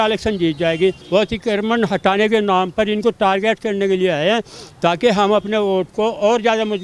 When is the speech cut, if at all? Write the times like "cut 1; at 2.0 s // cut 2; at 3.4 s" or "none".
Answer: cut 1; at 1.0 s

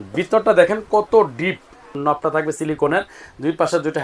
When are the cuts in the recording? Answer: cut 1; at 2.0 s

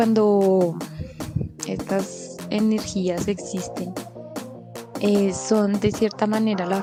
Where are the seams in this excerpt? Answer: none

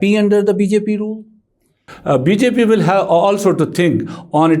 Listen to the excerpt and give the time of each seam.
cut 1; at 1.9 s

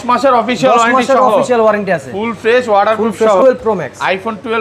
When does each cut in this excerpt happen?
cut 1; at 3.4 s

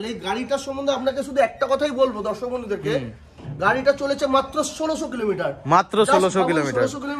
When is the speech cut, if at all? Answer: none

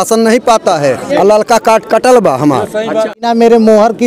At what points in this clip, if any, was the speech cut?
cut 1; at 1.0 s // cut 2; at 3.3 s

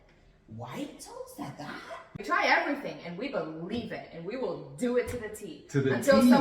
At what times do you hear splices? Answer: cut 1; at 2.2 s

